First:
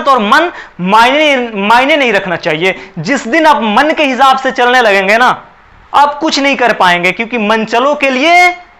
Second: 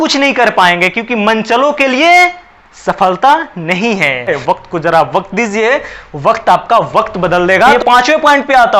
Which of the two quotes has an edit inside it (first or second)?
second